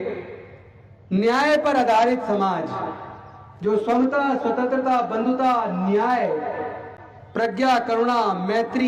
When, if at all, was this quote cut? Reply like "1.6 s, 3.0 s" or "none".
none